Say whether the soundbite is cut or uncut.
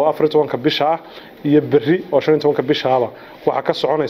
uncut